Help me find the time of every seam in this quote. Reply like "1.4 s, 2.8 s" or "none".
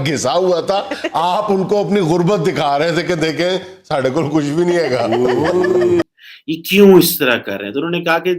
6.0 s